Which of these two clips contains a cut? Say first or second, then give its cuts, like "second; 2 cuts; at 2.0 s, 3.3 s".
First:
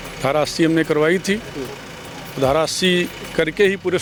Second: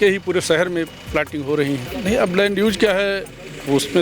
second; 1 cut; at 1.9 s